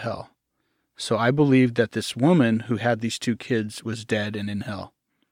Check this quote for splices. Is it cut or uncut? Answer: uncut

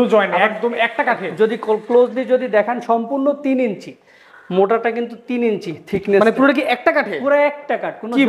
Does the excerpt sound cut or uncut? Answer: uncut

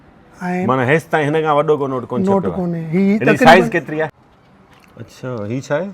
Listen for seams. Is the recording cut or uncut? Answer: cut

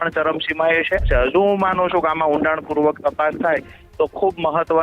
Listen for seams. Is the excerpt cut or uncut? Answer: cut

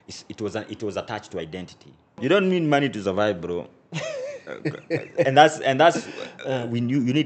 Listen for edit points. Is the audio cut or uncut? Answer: cut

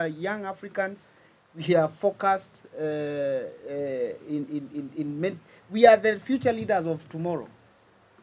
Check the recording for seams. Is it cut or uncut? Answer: uncut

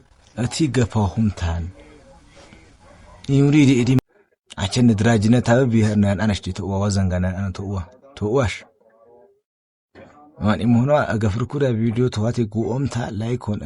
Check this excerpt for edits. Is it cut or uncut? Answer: cut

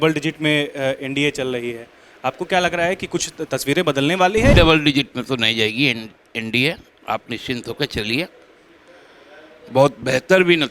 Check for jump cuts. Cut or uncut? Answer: cut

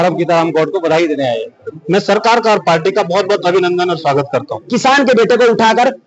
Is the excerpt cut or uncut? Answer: cut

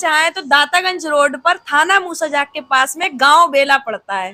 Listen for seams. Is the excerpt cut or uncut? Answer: uncut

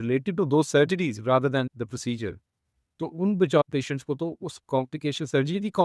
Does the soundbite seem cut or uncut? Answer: uncut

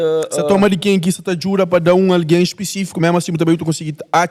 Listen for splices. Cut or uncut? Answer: uncut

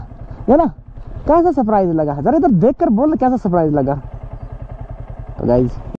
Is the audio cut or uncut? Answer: uncut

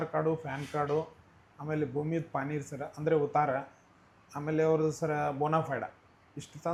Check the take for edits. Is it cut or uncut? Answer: uncut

